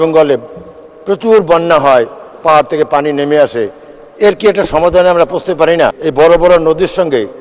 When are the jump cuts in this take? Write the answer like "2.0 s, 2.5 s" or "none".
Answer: 6.0 s